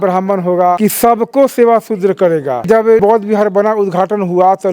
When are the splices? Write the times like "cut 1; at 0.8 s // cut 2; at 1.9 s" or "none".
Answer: cut 1; at 0.8 s // cut 2; at 2.9 s